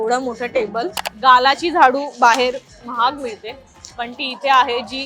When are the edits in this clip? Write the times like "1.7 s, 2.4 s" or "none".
1.0 s

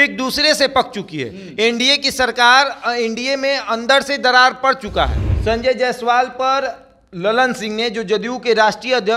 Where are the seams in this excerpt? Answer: 5.2 s

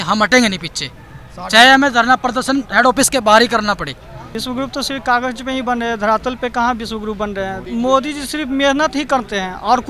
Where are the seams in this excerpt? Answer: 4.3 s, 7.7 s

